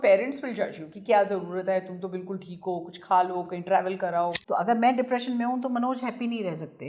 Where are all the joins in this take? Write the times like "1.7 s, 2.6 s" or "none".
4.3 s